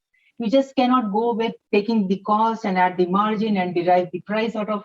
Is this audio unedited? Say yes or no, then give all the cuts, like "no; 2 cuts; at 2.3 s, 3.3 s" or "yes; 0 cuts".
no; 1 cut; at 1.6 s